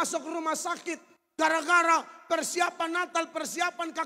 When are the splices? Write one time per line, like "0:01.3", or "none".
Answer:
0:01.1

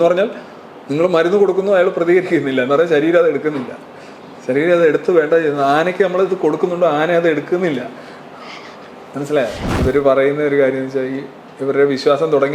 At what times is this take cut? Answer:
0:09.6

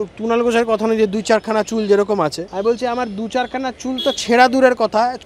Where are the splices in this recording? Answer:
0:02.4

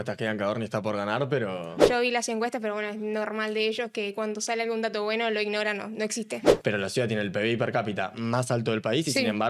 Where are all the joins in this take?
0:01.8
0:06.5

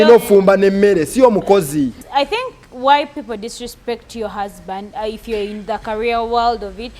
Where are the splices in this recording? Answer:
0:02.0

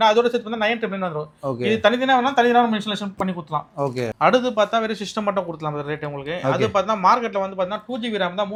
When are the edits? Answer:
none

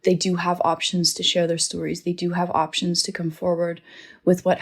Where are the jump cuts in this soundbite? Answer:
none

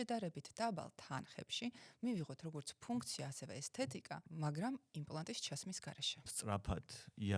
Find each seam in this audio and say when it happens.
0:04.3
0:06.3

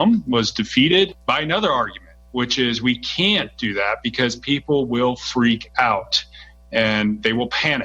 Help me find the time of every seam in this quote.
none

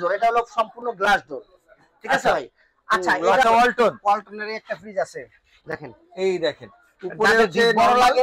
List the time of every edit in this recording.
0:03.4

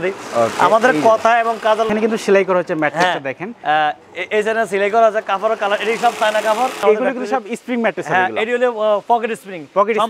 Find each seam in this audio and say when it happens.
0:01.9
0:06.8

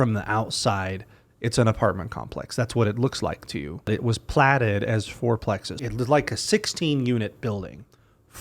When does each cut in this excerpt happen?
0:03.9
0:05.8

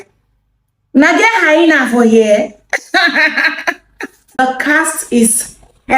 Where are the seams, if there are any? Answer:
0:04.4

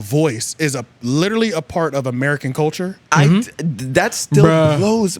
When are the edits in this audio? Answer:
none

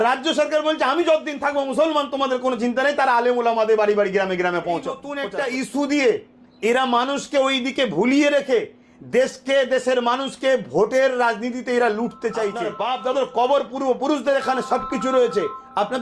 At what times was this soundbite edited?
0:05.1
0:12.7

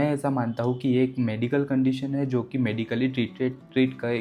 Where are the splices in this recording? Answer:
none

